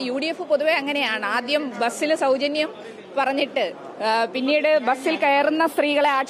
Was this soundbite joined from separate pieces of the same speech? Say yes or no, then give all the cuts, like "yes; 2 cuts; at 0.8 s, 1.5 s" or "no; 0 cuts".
no; 0 cuts